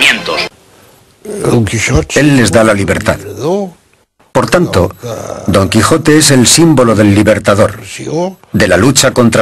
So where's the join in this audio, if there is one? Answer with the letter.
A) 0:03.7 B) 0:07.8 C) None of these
A